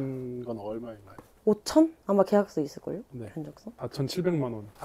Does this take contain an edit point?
no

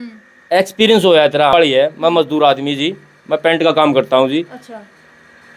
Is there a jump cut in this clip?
yes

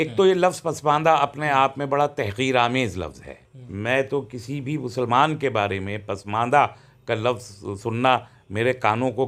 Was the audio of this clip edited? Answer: no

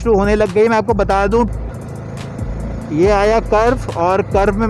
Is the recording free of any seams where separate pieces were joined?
no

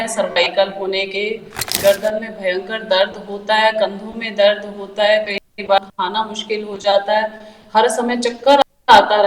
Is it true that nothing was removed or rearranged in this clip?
no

